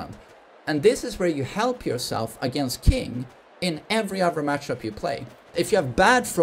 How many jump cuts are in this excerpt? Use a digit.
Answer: 1